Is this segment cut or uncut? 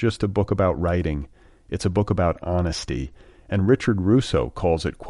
uncut